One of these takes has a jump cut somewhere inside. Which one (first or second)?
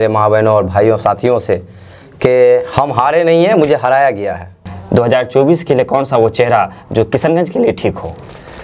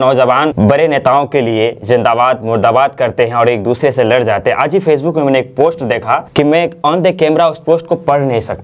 first